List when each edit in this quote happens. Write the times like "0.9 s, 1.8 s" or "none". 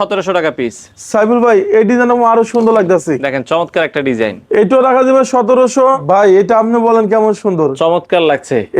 6.0 s